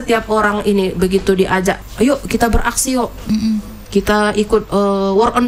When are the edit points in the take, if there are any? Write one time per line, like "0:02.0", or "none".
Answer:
0:01.8

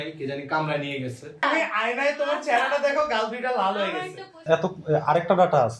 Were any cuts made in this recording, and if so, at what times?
0:01.4
0:04.4

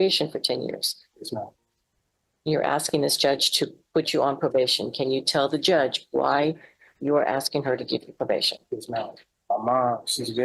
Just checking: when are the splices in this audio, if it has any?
0:09.3

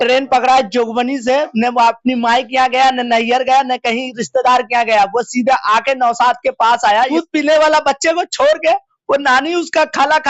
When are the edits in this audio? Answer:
0:07.1

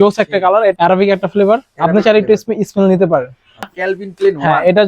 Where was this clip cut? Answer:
0:00.7
0:03.7

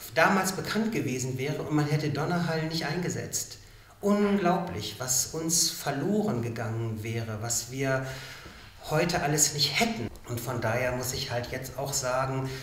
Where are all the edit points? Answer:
0:10.1

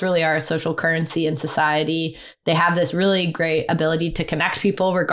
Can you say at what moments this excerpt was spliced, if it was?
none

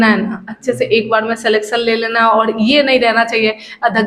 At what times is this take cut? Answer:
none

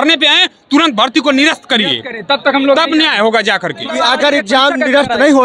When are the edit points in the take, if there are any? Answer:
0:03.9

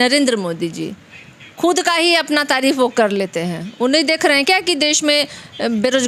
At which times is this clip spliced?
none

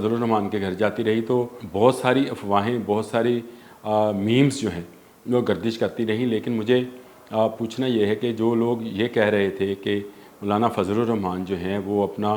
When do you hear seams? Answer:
0:01.6

